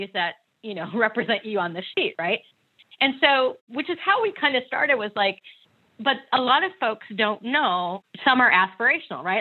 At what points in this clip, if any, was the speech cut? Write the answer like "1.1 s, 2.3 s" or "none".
8.0 s